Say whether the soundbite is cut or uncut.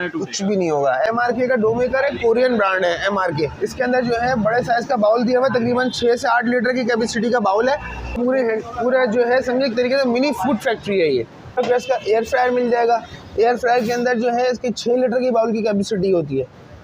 cut